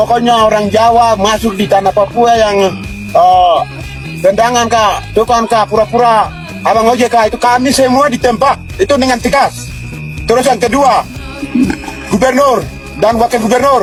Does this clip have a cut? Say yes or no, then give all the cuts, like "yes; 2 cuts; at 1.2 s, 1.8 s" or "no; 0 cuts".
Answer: no; 0 cuts